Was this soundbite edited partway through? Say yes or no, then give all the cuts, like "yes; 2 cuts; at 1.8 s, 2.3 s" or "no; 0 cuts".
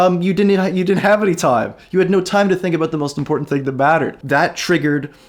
yes; 1 cut; at 4.2 s